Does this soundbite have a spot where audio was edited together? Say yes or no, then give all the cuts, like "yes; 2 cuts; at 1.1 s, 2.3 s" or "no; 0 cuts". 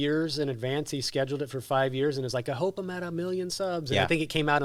no; 0 cuts